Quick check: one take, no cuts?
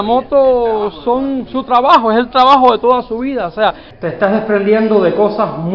no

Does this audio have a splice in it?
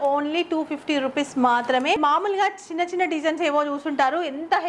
yes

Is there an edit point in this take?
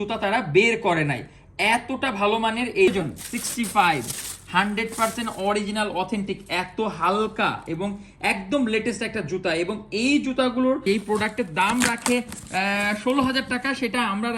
yes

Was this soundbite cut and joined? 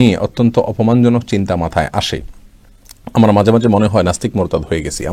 no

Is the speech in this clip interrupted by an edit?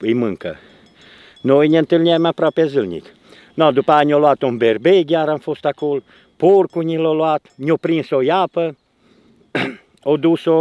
no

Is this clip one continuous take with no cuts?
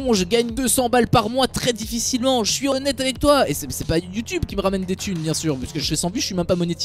no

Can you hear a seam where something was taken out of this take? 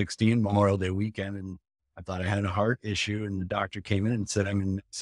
no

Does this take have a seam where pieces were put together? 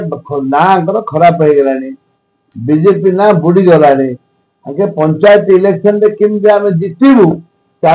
no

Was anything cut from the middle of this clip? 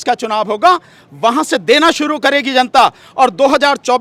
no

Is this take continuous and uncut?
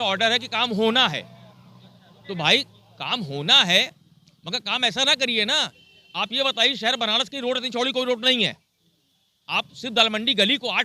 yes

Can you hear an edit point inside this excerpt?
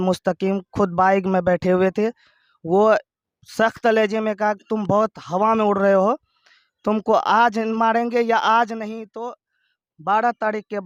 no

